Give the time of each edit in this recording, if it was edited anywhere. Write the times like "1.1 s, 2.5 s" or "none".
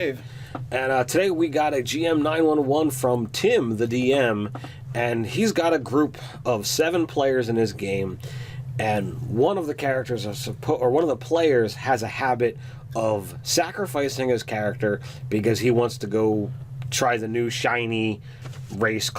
9.7 s